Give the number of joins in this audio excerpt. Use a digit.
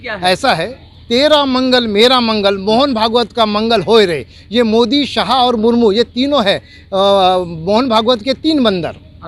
0